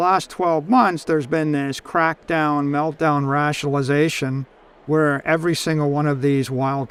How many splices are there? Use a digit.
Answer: 0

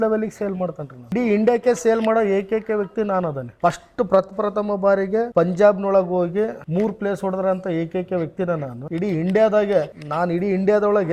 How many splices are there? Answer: 6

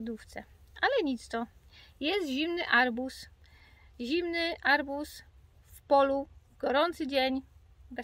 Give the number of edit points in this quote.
0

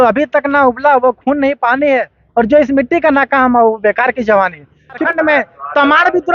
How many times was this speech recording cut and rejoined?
1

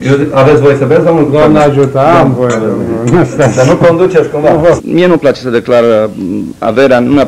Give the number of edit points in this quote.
1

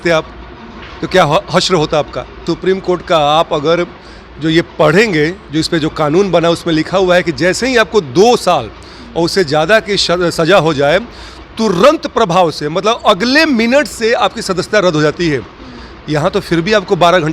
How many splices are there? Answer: 1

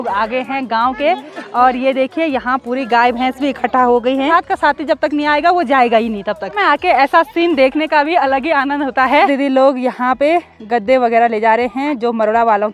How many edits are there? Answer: 3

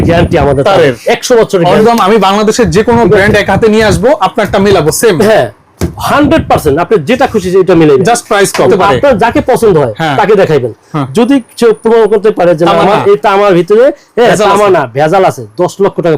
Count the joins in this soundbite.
2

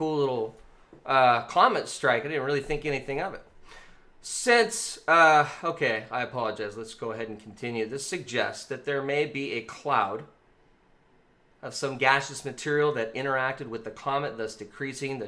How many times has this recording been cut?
1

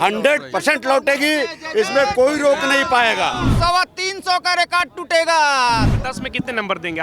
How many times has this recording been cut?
2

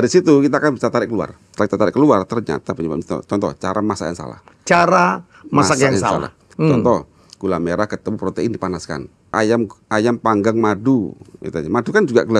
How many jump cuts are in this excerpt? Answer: 3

